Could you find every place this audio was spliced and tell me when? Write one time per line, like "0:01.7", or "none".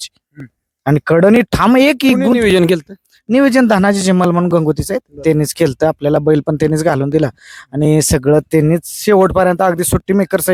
none